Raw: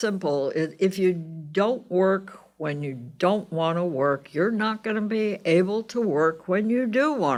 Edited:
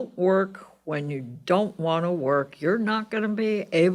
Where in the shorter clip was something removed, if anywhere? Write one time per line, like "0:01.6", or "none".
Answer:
none

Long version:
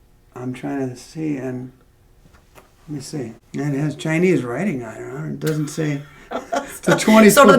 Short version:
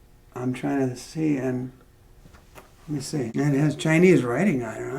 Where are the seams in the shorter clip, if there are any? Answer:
0:03.3

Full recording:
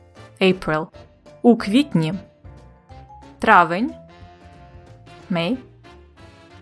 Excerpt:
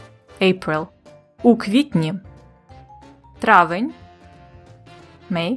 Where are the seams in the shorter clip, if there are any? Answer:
none

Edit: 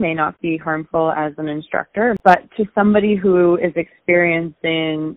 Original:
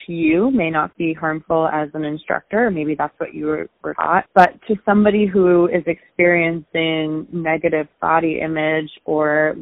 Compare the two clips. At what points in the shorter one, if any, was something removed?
0:02.2

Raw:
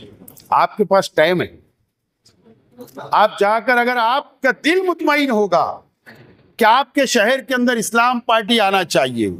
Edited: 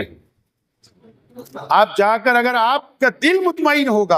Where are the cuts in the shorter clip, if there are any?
none

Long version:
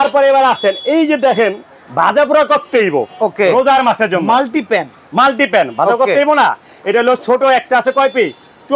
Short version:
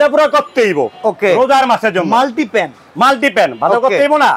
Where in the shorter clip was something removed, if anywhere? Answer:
none

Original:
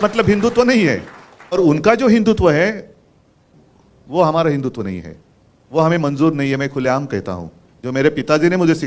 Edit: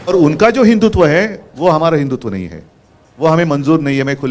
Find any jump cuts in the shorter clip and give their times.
0:01.4

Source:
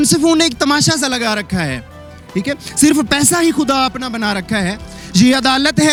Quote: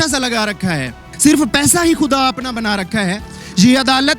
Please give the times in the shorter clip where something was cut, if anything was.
0:01.1

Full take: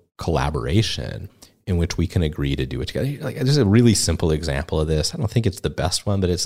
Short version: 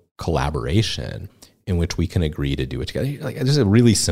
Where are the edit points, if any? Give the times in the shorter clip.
none

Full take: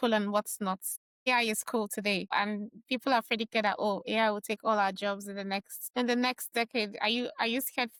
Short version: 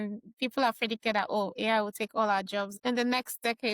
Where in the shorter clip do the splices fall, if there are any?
0:02.7

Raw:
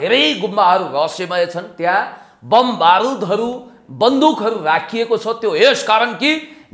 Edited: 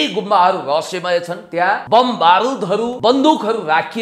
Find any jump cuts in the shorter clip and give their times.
0:01.8
0:02.9

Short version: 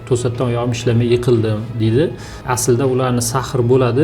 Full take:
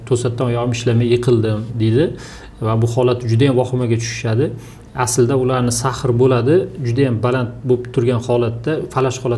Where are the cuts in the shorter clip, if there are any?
0:02.3

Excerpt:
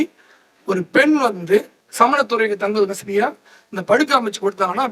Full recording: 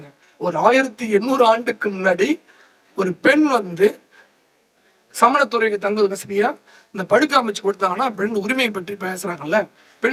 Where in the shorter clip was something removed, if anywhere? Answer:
0:01.8

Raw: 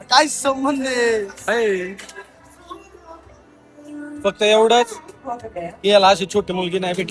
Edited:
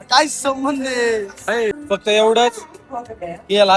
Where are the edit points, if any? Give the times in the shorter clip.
0:01.7

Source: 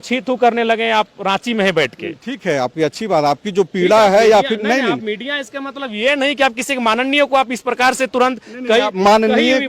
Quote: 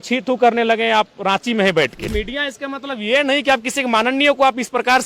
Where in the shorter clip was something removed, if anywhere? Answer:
0:02.1

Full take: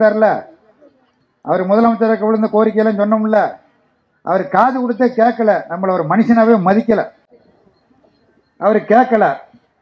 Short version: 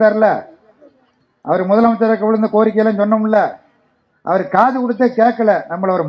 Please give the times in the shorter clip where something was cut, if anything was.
none

